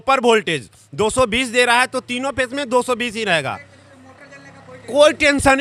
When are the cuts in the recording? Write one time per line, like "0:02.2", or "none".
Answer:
none